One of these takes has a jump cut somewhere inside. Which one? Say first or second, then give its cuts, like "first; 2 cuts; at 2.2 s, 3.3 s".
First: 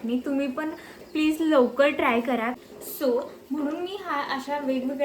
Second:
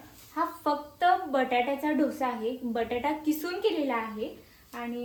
first; 1 cut; at 2.6 s